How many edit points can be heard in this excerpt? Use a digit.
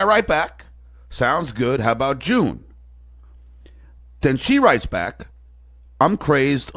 0